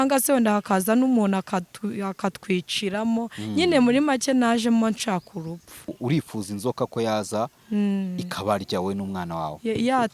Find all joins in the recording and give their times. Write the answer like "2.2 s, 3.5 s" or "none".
5.9 s